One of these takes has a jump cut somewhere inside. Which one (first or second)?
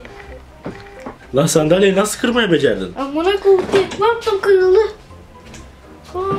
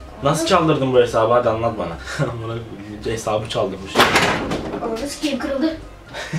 second